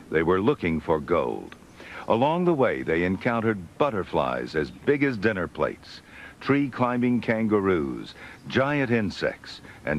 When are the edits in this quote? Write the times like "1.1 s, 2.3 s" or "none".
none